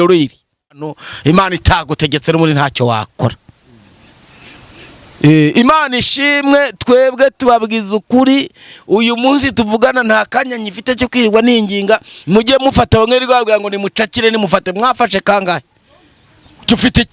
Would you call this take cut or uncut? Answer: cut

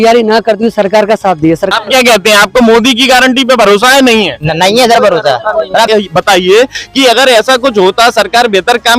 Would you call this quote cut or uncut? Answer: cut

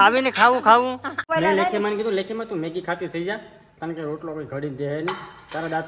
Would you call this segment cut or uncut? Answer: cut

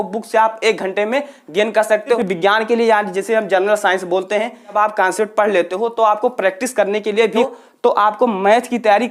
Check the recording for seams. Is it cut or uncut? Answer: cut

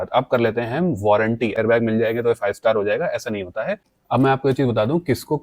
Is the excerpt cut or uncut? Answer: cut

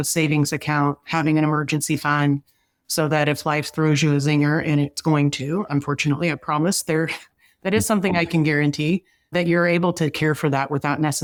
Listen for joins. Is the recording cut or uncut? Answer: uncut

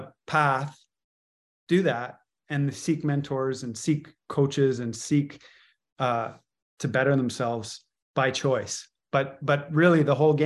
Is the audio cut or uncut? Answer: uncut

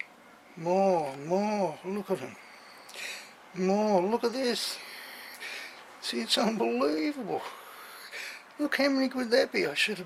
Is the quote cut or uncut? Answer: uncut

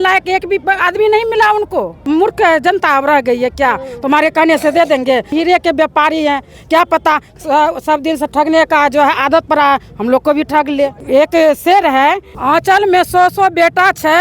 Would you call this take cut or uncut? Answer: cut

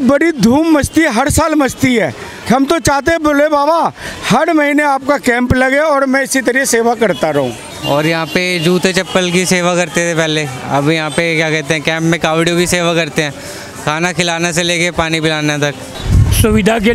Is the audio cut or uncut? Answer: cut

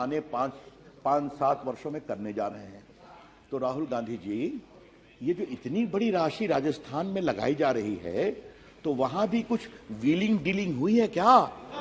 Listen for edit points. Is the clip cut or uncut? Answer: uncut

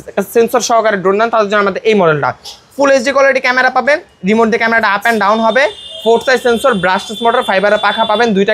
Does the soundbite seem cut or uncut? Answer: uncut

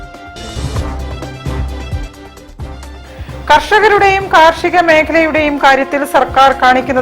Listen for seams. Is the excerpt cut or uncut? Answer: cut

